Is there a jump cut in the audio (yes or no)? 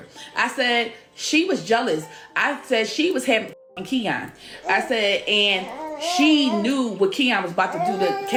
no